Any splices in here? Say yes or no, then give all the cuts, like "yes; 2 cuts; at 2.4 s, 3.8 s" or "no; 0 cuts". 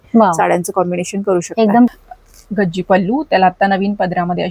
yes; 1 cut; at 1.9 s